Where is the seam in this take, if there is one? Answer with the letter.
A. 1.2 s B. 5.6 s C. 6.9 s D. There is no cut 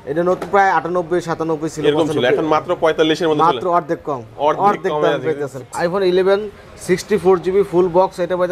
B